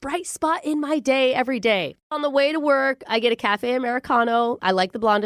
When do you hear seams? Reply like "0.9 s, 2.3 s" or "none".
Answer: 2.1 s